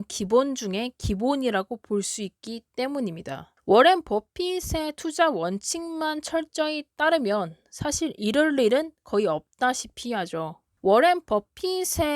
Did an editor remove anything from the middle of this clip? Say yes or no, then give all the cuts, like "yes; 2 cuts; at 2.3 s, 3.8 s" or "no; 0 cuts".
yes; 2 cuts; at 3.5 s, 10.6 s